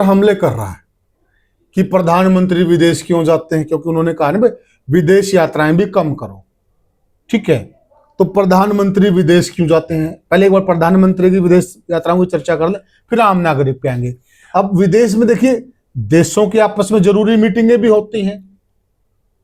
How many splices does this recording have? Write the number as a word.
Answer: zero